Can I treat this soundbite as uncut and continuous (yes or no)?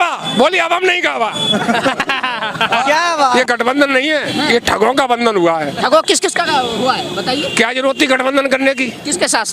no